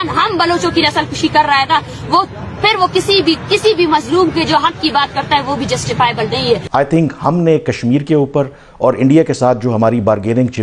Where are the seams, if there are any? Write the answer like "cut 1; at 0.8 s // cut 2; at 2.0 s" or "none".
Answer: cut 1; at 6.6 s